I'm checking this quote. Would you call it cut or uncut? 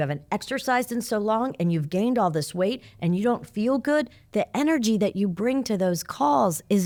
uncut